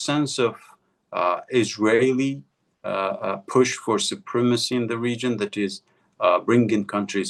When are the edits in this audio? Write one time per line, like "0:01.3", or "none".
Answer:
none

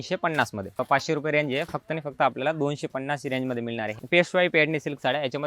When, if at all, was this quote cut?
0:00.8
0:03.9

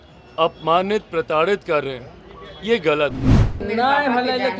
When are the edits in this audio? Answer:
0:03.6

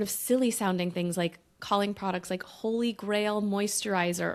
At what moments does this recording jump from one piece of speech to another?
none

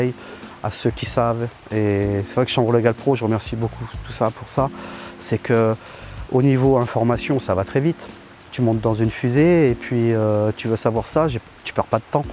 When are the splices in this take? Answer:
none

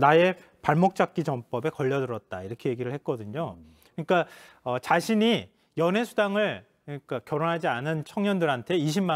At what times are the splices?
none

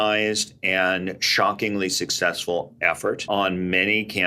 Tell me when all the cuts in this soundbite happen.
0:03.2

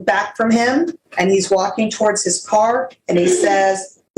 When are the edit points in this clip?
0:01.0

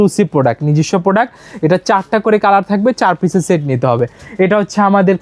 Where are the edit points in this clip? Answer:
none

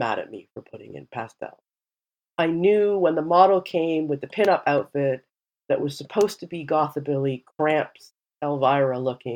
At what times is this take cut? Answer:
none

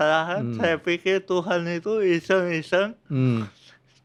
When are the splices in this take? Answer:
none

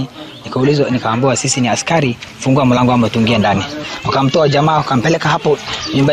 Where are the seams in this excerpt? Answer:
none

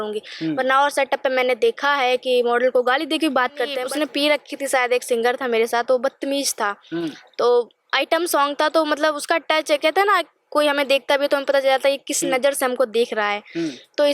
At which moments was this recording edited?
0:03.8

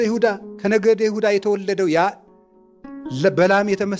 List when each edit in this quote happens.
none

